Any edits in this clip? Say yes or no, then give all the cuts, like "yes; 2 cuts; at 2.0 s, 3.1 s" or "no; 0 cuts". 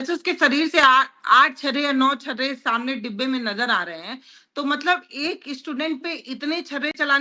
no; 0 cuts